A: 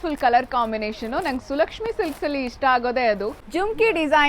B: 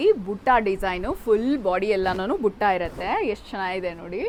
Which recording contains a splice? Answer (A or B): A